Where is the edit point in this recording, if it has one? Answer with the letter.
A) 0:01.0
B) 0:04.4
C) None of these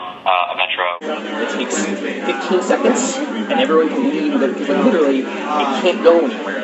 A